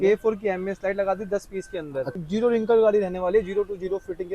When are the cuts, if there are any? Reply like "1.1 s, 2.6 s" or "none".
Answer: 2.2 s

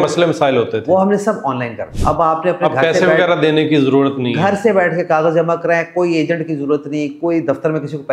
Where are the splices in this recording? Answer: 1.9 s

